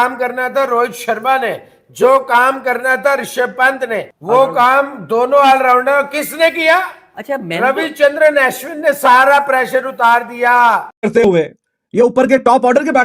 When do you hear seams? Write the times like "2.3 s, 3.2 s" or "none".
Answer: 4.1 s, 10.9 s